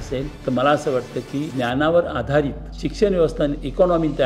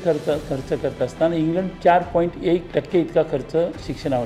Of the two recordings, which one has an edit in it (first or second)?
second